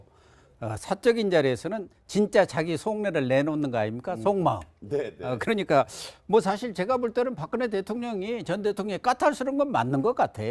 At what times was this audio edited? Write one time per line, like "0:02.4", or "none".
0:08.1